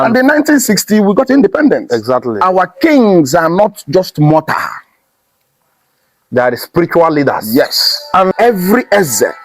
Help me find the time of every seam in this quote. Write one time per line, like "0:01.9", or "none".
0:02.4
0:08.3